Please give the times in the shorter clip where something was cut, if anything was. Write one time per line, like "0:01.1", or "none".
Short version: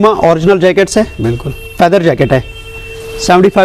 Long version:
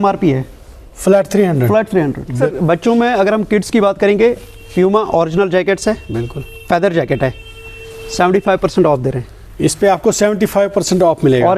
none